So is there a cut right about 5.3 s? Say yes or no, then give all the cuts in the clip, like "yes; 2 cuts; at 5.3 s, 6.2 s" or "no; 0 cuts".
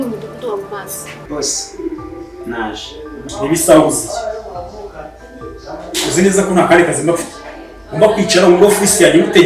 no; 1 cut; at 1.1 s